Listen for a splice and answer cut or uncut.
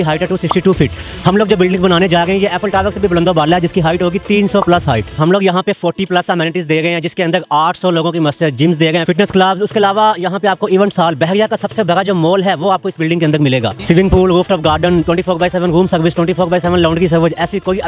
cut